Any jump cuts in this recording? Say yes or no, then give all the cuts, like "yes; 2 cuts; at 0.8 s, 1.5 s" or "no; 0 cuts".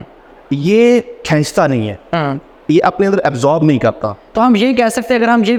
no; 0 cuts